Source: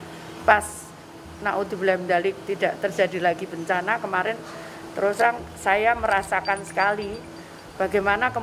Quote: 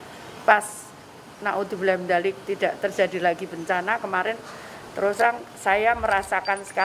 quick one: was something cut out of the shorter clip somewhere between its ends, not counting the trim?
no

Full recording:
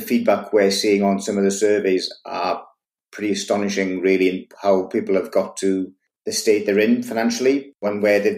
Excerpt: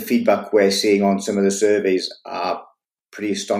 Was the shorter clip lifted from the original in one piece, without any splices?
yes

